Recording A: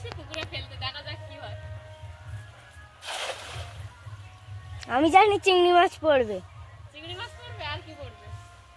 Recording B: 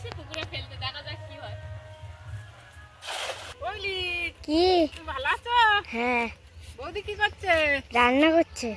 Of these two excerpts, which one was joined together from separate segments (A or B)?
B